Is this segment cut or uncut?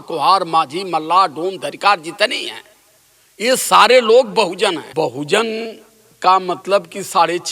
cut